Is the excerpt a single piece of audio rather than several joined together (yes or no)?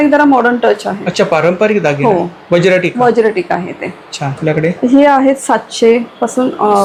yes